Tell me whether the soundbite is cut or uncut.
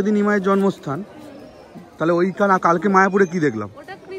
uncut